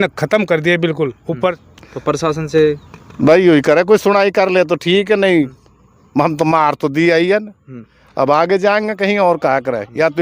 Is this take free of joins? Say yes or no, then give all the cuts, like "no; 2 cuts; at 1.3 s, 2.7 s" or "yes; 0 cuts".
no; 1 cut; at 1.6 s